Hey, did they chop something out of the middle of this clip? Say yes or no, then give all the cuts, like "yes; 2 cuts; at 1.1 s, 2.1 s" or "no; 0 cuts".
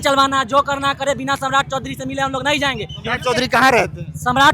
no; 0 cuts